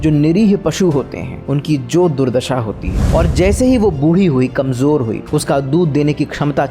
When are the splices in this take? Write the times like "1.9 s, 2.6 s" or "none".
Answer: 3.0 s

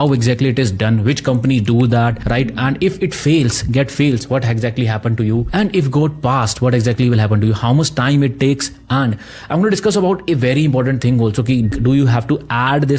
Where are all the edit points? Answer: none

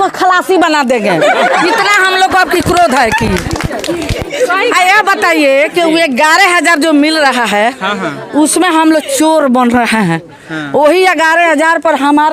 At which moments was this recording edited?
none

